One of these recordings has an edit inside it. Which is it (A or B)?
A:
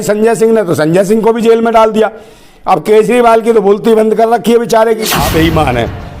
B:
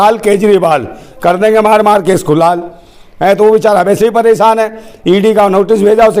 A